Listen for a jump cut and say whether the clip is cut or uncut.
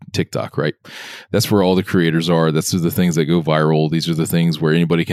uncut